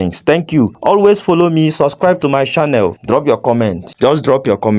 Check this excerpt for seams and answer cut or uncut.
cut